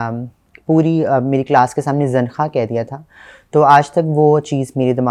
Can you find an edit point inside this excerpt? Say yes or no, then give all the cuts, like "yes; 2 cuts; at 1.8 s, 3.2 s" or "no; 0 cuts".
no; 0 cuts